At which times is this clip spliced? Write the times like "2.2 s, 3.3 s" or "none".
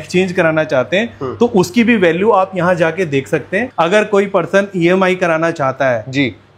3.7 s